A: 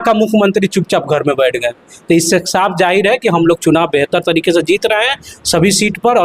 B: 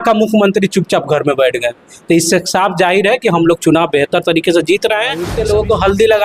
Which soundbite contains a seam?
B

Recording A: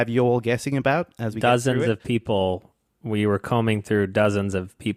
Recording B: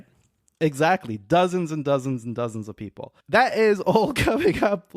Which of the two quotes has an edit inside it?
B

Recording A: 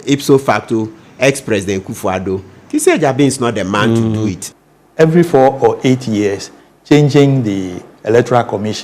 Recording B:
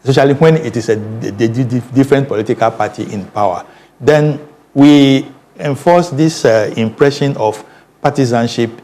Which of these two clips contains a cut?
A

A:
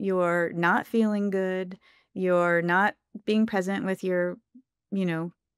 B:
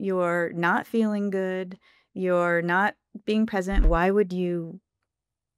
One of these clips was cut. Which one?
B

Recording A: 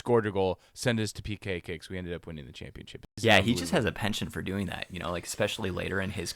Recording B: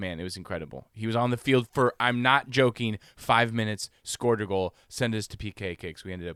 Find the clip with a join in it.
A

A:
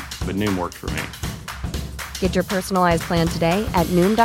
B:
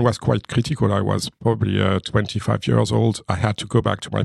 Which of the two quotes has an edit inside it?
B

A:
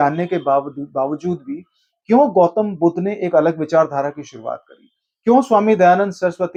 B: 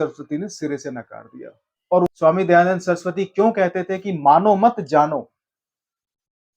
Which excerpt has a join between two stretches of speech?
B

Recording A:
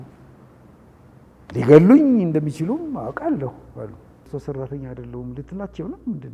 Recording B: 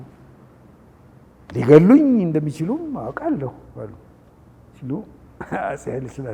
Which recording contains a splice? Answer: A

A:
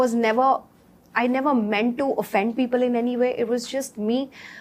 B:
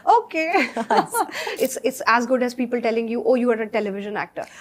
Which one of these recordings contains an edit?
B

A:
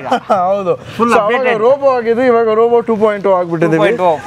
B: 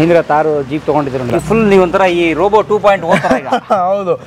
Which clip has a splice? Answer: B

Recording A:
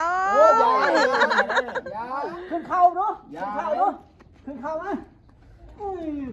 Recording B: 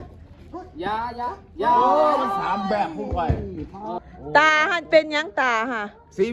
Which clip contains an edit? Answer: B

